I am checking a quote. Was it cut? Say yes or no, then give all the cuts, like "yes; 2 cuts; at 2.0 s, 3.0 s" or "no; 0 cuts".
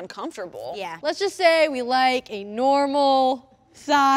yes; 1 cut; at 0.9 s